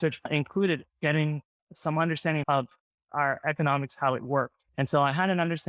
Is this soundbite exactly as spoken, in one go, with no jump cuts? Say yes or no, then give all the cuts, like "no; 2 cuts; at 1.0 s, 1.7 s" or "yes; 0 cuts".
no; 2 cuts; at 2.5 s, 4.6 s